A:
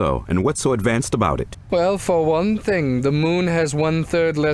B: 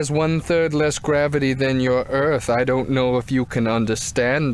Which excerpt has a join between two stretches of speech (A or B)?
B